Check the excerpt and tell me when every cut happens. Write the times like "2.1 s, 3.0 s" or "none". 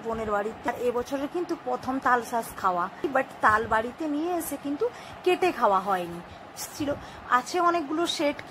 0.7 s, 3.0 s, 6.7 s